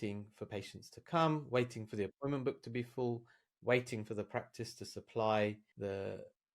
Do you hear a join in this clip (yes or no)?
yes